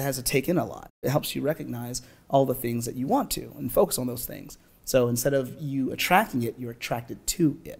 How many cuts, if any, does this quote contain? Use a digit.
1